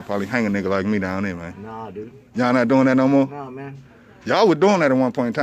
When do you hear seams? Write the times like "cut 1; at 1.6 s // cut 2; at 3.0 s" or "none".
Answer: none